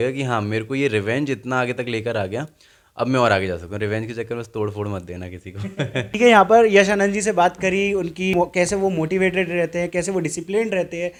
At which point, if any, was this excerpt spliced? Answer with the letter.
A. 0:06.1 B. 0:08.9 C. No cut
C